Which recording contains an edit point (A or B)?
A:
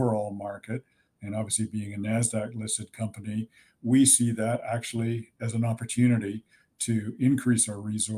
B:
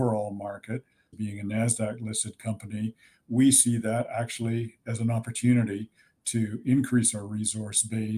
B